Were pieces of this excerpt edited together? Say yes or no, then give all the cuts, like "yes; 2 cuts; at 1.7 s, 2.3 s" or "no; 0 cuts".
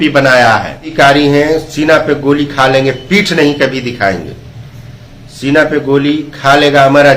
yes; 1 cut; at 0.9 s